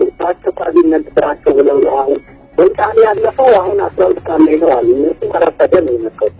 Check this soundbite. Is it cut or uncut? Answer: cut